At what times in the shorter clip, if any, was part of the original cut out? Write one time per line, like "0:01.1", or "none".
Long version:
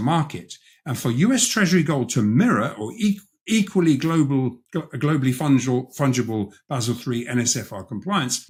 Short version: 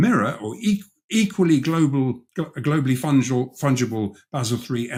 none